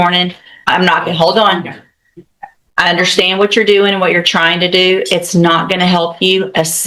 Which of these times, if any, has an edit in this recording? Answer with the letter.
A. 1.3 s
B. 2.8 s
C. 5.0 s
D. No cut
D